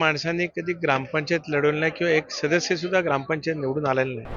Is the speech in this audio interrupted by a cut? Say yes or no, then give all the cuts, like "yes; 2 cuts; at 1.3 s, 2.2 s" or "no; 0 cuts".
no; 0 cuts